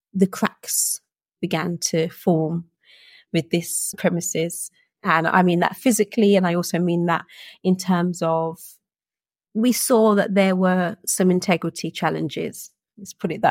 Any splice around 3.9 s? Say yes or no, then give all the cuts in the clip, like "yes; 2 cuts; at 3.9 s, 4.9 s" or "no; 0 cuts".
yes; 1 cut; at 3.9 s